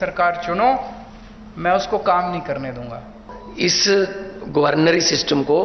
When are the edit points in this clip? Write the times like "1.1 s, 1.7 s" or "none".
3.3 s